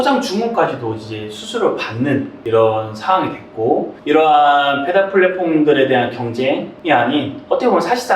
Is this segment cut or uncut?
cut